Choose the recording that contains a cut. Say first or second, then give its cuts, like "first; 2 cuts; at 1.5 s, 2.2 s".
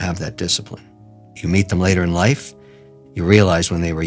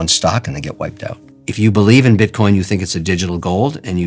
second; 1 cut; at 1.3 s